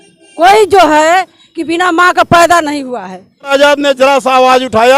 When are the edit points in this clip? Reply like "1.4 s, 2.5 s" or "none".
3.5 s